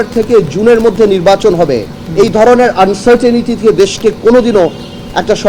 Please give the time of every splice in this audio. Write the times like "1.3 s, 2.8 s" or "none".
none